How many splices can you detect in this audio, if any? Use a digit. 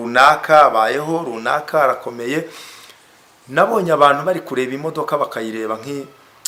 0